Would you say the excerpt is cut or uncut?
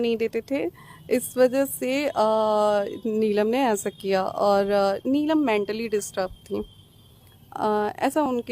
uncut